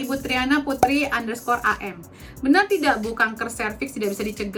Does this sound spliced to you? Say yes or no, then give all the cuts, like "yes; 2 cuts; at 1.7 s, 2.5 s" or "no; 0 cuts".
no; 0 cuts